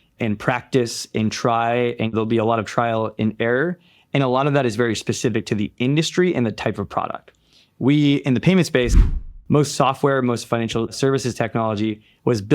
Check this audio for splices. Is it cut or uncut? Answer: cut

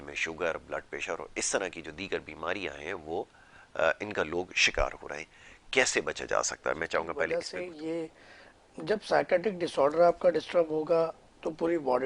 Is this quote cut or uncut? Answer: cut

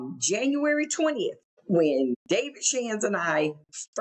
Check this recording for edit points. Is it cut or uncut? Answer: cut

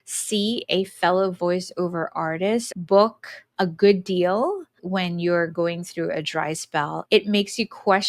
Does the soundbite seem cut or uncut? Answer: cut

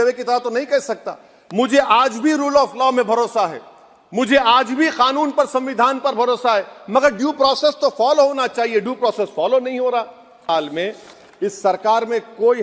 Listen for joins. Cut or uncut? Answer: cut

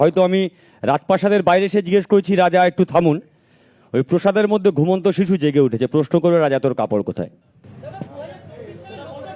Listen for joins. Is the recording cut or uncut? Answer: uncut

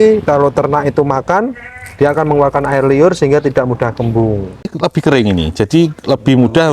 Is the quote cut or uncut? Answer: cut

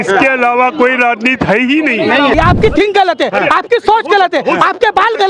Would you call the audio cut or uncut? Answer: cut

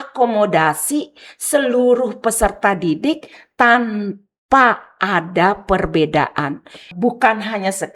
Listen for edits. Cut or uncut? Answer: cut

